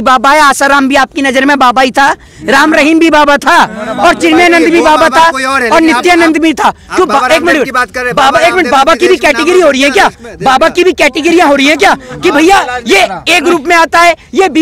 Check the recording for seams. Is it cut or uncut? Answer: uncut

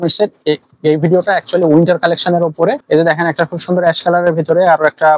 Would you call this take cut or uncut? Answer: cut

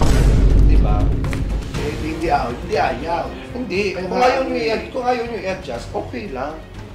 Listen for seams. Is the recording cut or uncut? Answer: uncut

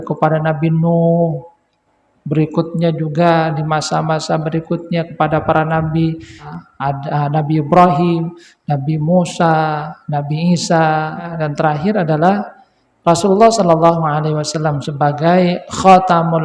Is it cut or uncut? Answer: cut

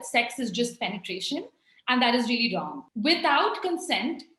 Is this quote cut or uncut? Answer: cut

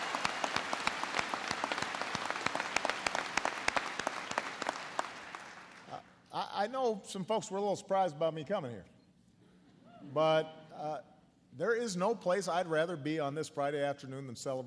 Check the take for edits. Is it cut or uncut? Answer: cut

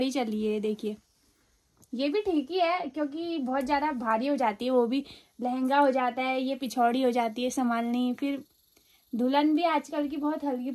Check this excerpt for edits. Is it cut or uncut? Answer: uncut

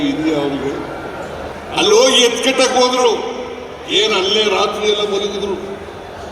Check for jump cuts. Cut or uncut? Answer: cut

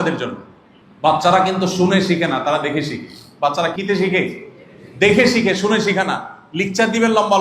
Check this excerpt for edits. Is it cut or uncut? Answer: cut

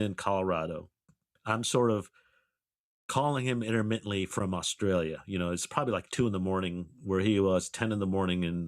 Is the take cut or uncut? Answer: uncut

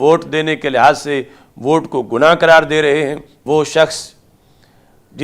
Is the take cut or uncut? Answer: cut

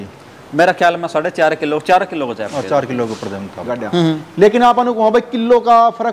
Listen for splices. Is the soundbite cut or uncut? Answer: cut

